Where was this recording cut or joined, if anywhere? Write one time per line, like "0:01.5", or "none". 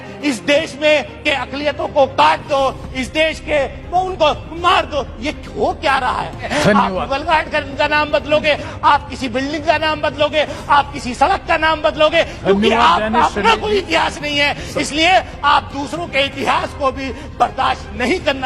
0:06.5